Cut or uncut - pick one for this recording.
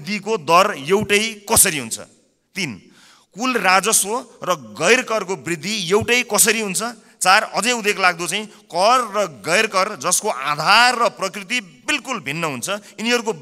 uncut